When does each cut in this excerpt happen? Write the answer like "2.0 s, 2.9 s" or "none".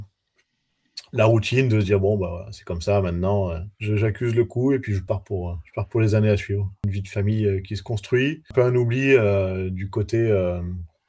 6.9 s, 8.4 s